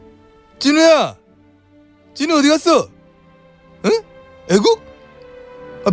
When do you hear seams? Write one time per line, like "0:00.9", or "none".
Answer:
none